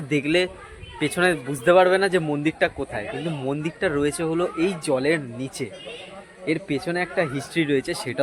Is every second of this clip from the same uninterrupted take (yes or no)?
yes